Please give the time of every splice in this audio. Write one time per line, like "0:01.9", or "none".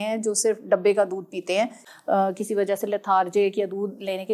0:01.6